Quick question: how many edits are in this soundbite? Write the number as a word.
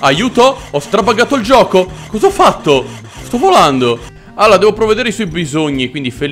one